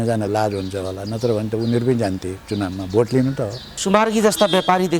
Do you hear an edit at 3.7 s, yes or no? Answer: yes